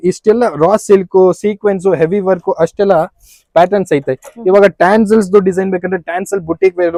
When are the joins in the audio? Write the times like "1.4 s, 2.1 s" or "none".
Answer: none